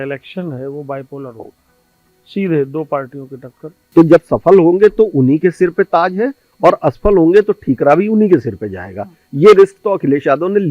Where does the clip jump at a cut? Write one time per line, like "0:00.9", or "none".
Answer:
0:03.8

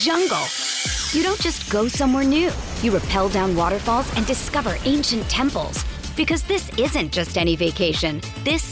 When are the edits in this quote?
none

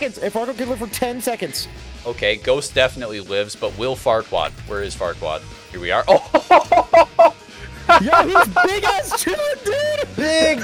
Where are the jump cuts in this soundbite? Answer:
none

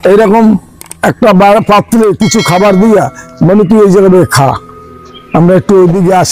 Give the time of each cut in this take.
none

